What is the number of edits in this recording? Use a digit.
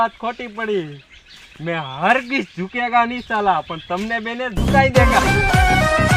0